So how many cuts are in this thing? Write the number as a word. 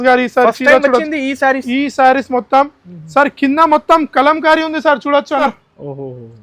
one